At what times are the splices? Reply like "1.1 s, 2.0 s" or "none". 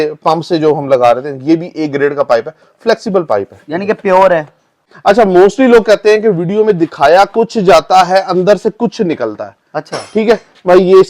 4.9 s